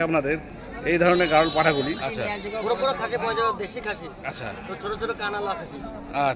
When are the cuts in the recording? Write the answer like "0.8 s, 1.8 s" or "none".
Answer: 2.0 s